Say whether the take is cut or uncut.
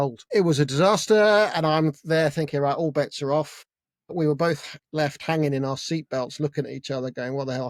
uncut